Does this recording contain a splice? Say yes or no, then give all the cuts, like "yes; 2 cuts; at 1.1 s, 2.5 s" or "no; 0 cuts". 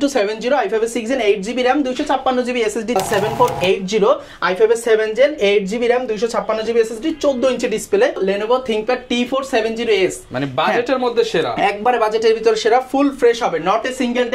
yes; 2 cuts; at 3.0 s, 8.2 s